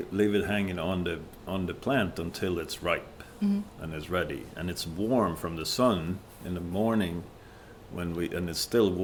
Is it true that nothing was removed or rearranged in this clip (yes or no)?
yes